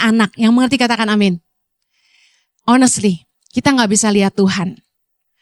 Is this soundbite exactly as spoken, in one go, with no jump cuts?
yes; 0 cuts

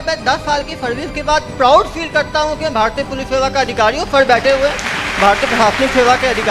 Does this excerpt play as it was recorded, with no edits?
yes; 0 cuts

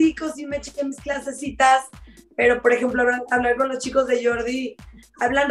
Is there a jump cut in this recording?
no; 0 cuts

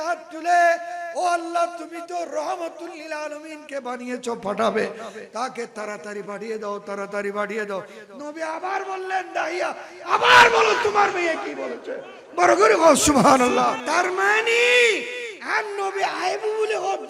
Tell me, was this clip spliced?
yes; 1 cut; at 13.8 s

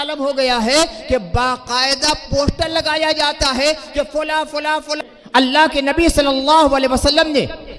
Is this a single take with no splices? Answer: no; 1 cut; at 4.9 s

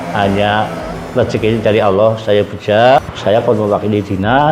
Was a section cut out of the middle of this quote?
yes; 1 cut; at 3.0 s

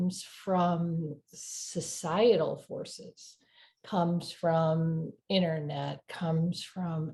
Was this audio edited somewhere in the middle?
no; 0 cuts

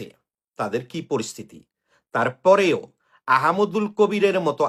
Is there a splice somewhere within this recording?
no; 0 cuts

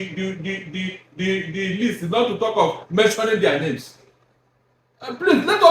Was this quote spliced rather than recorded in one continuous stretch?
no; 0 cuts

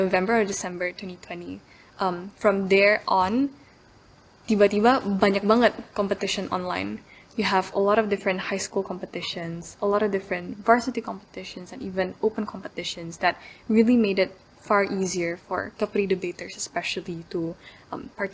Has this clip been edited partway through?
no; 0 cuts

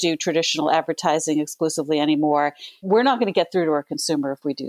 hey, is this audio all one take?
no; 1 cut; at 2.7 s

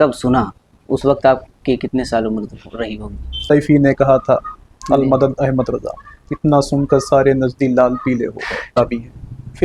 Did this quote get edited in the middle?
yes; 2 cuts; at 3.4 s, 8.8 s

